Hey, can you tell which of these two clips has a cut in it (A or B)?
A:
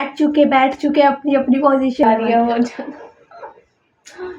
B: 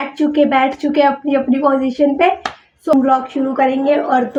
A